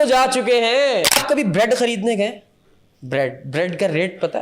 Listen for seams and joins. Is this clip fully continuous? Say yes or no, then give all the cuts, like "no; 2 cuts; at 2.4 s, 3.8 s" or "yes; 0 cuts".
no; 1 cut; at 1.2 s